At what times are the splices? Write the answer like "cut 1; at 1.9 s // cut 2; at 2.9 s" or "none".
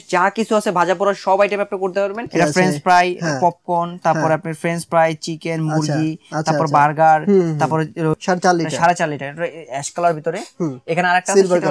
cut 1; at 2.2 s // cut 2; at 8.2 s

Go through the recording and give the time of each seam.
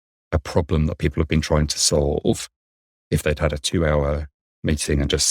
none

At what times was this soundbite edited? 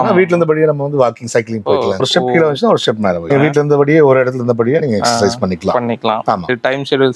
none

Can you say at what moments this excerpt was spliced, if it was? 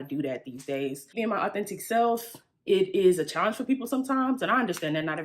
cut 1; at 1.2 s

